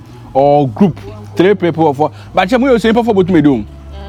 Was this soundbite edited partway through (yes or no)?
no